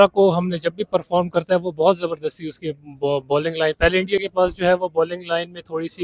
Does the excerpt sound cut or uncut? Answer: uncut